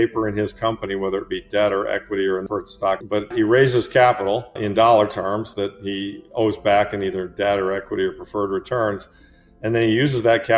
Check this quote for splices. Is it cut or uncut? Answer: cut